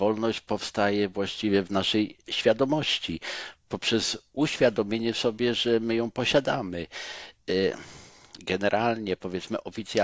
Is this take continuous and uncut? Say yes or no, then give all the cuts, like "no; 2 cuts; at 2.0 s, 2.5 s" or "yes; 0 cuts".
yes; 0 cuts